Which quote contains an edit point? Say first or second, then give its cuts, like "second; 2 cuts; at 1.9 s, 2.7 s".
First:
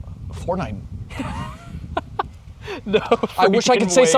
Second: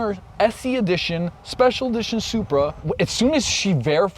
second; 1 cut; at 2.8 s